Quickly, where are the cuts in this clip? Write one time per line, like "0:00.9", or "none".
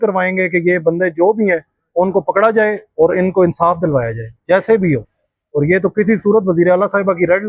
none

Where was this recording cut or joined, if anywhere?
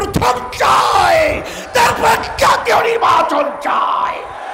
none

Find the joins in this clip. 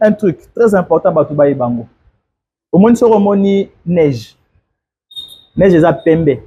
none

